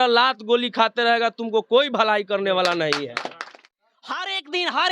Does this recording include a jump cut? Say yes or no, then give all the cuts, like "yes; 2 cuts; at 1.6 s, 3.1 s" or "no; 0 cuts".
yes; 1 cut; at 3.6 s